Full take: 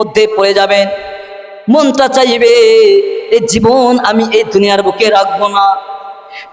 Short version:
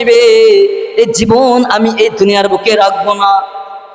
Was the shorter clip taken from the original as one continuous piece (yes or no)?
yes